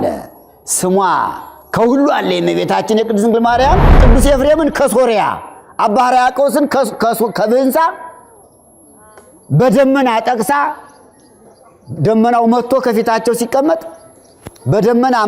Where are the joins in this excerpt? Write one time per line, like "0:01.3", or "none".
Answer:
0:04.0